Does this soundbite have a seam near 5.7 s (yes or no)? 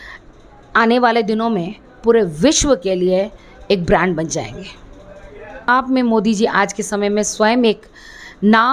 yes